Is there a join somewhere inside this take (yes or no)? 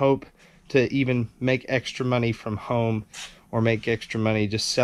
no